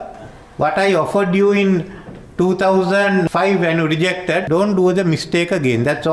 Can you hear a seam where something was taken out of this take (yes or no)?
yes